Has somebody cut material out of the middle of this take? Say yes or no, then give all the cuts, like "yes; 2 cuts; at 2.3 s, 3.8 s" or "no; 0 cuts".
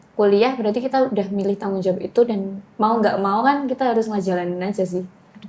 no; 0 cuts